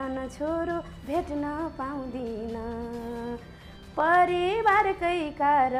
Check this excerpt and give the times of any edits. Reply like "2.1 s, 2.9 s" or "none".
none